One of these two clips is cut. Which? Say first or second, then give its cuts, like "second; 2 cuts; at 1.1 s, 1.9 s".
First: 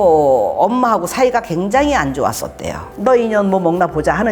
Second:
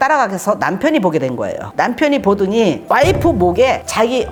first; 1 cut; at 2.9 s